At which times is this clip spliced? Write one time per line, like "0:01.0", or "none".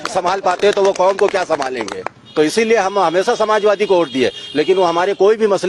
0:02.2